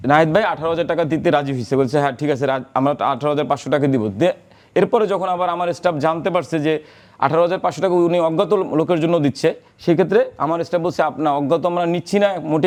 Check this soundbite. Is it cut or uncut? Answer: uncut